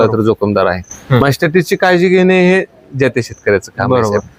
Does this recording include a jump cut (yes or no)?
no